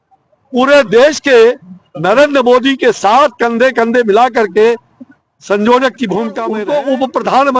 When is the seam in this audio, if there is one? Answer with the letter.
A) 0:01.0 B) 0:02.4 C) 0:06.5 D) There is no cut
C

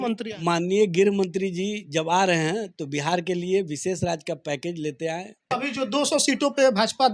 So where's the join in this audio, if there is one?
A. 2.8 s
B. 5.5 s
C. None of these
B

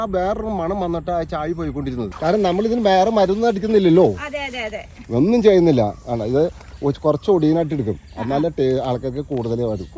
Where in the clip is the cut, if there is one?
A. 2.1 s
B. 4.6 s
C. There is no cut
A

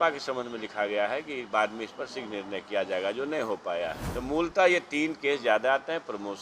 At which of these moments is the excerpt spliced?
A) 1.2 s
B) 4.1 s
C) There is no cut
B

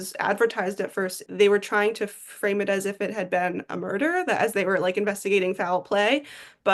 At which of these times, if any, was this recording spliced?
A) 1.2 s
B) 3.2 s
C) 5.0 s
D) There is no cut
A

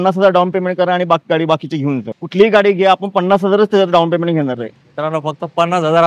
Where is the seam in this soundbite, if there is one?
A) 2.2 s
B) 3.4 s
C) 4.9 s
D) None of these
A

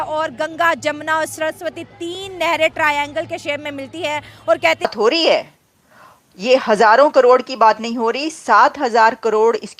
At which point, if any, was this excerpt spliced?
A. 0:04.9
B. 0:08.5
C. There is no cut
A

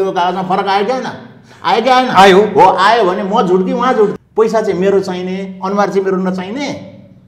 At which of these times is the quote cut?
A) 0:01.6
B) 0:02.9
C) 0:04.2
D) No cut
C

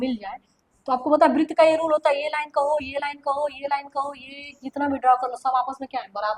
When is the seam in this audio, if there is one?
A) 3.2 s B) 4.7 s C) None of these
C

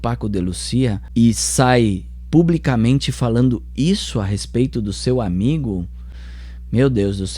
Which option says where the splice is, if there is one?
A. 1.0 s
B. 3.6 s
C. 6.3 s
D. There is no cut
A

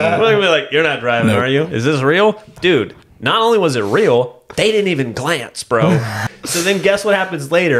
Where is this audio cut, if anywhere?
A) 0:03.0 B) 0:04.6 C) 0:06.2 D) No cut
C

